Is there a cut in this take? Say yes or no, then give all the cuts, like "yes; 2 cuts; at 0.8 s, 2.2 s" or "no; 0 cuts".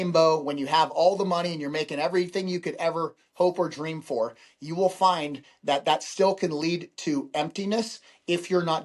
no; 0 cuts